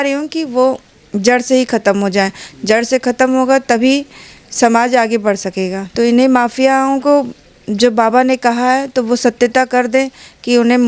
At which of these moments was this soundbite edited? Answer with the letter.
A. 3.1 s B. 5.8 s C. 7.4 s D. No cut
B